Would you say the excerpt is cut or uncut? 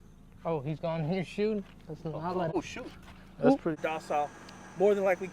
cut